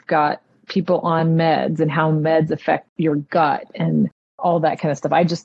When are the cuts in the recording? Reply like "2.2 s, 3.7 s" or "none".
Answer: 2.9 s